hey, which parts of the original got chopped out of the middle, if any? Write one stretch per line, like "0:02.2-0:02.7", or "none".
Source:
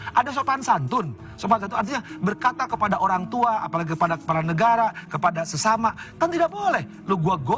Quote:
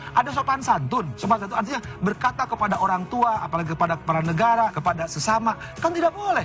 0:01.1-0:01.3
0:05.0-0:05.1